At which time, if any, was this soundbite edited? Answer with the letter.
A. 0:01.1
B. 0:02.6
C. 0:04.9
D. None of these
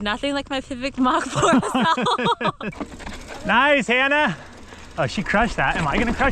B